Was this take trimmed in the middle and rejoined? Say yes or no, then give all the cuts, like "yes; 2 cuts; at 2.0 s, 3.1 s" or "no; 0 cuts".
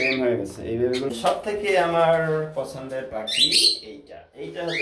yes; 1 cut; at 1.1 s